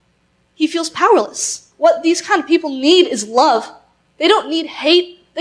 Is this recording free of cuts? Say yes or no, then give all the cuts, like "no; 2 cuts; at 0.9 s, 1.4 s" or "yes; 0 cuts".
no; 1 cut; at 1.6 s